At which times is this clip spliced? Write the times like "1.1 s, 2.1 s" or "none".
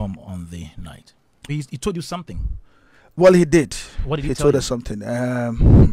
1.5 s